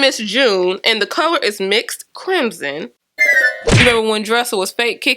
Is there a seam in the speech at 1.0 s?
no; 1 cut; at 3.9 s

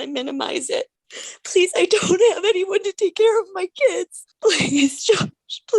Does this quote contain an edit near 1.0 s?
yes; 2 cuts; at 1.0 s, 4.2 s

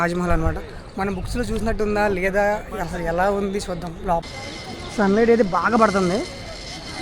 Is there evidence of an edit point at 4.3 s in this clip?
yes; 1 cut; at 4.3 s

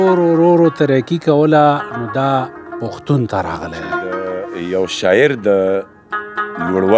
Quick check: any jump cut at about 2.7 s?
no; 1 cut; at 4.2 s

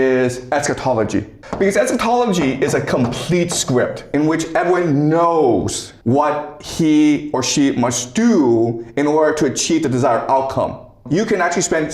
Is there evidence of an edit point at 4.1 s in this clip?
yes; 4 cuts; at 1.4 s, 4.1 s, 5.8 s, 11.0 s

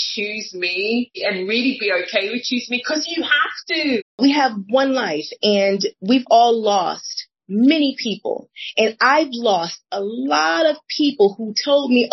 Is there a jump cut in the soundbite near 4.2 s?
yes; 2 cuts; at 1.2 s, 4.2 s

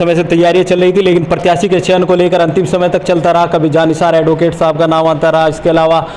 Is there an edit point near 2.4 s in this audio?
no; 0 cuts

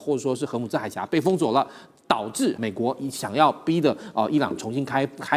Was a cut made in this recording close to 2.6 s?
yes; 1 cut; at 2.6 s

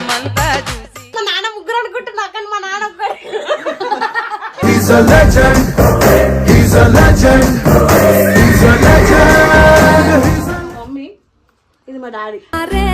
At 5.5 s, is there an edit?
no; 2 cuts; at 1.1 s, 10.6 s

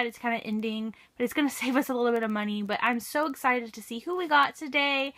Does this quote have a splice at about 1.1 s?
no; 1 cut; at 3.6 s

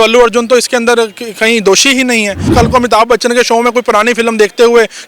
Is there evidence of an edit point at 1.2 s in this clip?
no; 1 cut; at 2.5 s

